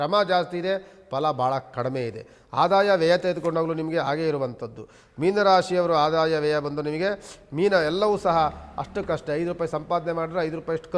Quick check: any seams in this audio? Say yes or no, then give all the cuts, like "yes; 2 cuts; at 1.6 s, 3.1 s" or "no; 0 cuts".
no; 0 cuts